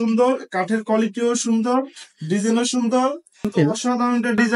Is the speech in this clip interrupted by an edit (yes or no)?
yes